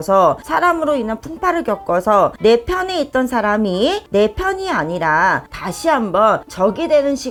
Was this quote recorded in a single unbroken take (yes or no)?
yes